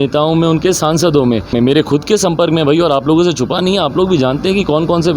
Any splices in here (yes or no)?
yes